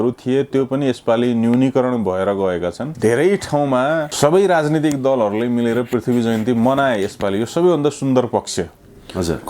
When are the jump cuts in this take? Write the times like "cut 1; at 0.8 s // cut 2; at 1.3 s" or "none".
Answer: cut 1; at 2.8 s // cut 2; at 4.1 s